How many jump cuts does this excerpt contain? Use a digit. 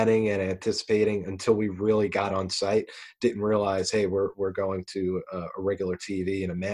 0